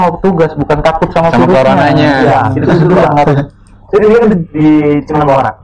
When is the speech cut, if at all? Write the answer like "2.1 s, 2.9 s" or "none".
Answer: none